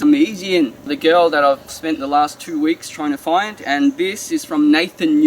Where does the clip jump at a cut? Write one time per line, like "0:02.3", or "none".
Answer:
0:00.9
0:01.7